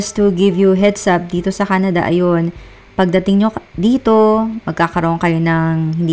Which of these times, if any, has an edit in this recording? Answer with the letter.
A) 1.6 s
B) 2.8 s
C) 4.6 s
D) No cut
D